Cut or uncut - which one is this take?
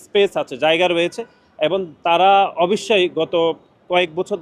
uncut